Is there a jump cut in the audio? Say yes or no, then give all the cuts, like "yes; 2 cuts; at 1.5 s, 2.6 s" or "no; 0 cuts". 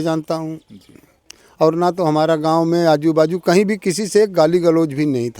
no; 0 cuts